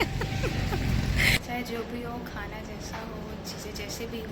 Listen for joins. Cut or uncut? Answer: cut